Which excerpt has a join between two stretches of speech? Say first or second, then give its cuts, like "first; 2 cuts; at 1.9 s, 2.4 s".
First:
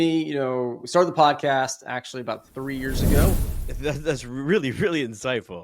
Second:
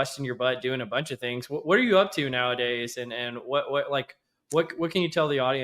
first; 1 cut; at 3.3 s